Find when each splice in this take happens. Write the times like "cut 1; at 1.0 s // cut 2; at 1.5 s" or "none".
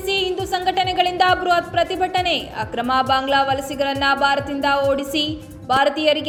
none